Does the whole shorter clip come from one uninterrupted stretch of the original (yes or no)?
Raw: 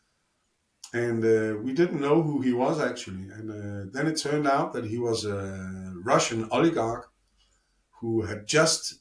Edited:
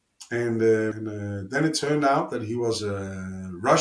no